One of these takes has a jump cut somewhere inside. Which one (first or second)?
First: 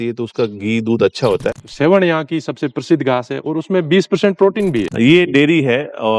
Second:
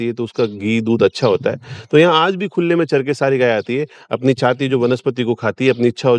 first